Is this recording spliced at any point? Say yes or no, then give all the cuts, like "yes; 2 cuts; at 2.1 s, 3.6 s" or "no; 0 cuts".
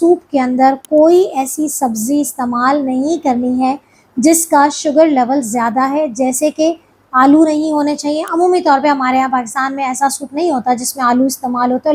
no; 0 cuts